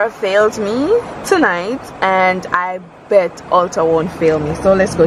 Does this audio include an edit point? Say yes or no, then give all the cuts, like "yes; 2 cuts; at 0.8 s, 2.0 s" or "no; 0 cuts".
no; 0 cuts